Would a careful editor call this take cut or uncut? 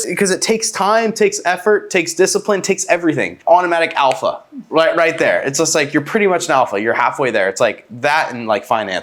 uncut